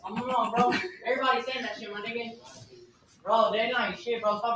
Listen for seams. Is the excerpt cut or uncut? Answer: uncut